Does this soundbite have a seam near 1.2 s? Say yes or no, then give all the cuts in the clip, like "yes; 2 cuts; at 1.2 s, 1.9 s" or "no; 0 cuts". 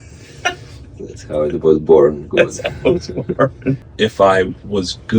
no; 1 cut; at 3.9 s